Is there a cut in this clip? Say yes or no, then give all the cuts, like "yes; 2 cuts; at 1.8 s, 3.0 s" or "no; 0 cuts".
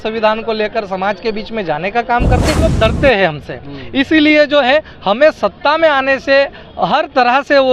yes; 1 cut; at 2.7 s